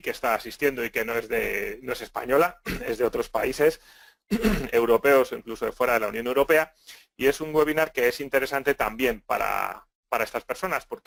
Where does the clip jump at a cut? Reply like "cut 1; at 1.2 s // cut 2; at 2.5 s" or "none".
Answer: none